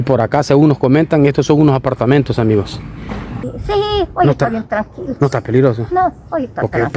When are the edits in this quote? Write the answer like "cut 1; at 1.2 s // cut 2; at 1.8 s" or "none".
cut 1; at 3.3 s